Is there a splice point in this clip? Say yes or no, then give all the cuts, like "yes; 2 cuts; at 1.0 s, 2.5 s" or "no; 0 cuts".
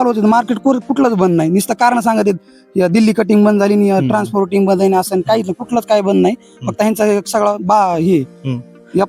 no; 0 cuts